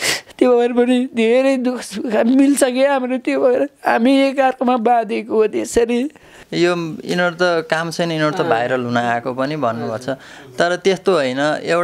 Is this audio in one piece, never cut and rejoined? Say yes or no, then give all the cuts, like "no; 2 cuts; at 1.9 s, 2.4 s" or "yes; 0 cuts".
no; 1 cut; at 6.4 s